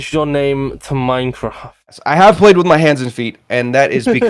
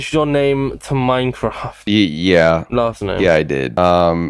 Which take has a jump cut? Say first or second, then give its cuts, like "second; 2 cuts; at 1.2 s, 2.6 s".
first; 1 cut; at 1.8 s